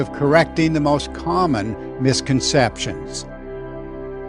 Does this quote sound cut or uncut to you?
uncut